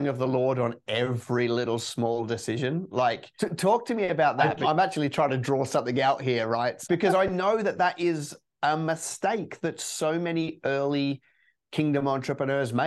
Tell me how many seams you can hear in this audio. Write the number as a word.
three